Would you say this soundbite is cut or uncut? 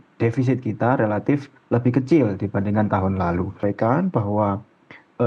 cut